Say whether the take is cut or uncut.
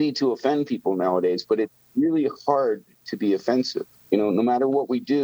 cut